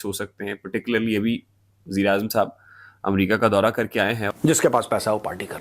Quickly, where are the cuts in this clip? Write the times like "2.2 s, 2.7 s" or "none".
4.2 s